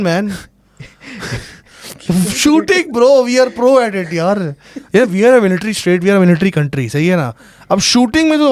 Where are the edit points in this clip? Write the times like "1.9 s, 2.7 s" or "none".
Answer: none